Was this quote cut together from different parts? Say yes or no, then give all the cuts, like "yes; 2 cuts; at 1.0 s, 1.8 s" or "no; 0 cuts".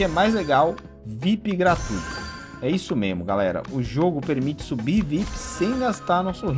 no; 0 cuts